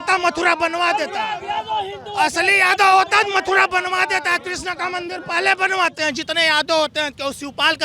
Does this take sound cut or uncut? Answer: cut